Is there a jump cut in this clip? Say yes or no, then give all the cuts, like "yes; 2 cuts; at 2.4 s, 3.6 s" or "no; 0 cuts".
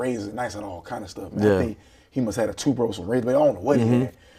no; 0 cuts